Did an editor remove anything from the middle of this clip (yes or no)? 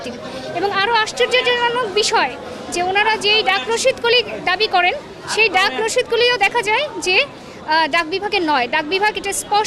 no